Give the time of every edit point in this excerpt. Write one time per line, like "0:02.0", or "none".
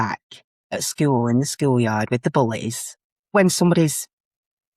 0:03.3

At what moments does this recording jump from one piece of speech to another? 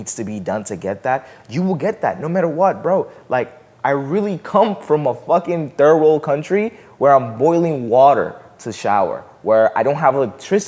none

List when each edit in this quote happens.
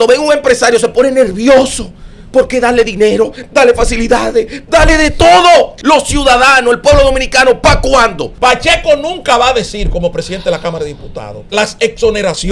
0:05.7
0:08.3
0:11.4

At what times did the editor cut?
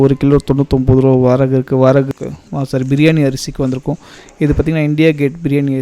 0:02.1

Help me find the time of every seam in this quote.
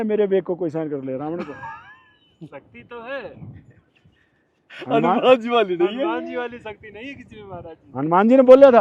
none

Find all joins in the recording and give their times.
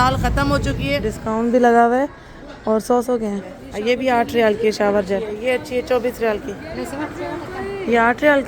0:01.1
0:03.7
0:05.4

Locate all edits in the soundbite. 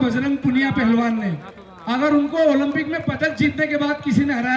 none

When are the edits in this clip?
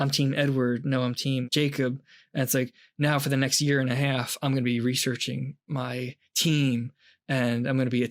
0:01.4

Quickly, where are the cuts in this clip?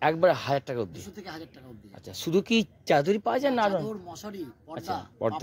none

